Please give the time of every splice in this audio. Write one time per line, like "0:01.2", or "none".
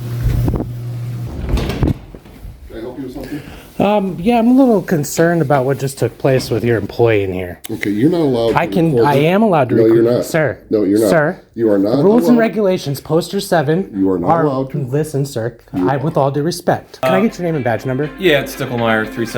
0:01.2
0:17.0